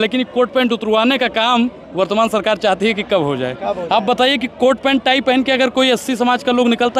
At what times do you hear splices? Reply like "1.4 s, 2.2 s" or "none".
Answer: none